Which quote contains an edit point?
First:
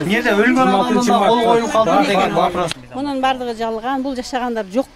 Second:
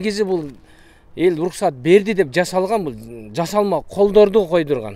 first; 1 cut; at 2.7 s

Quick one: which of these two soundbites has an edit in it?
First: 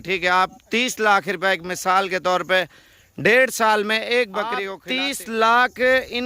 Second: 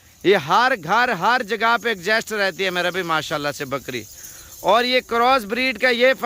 first; 1 cut; at 4.8 s

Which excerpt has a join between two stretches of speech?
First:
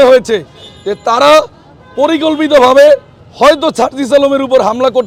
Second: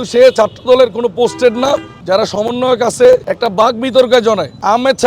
second; 1 cut; at 2.0 s

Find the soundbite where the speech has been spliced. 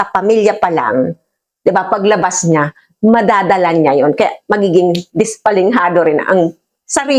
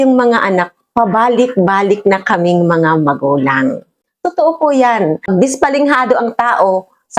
second; 1 cut; at 5.3 s

